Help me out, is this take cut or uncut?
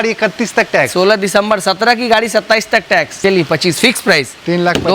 cut